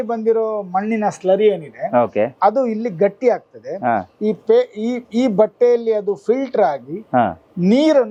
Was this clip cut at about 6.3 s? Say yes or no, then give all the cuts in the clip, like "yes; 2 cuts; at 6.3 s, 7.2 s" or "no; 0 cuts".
no; 0 cuts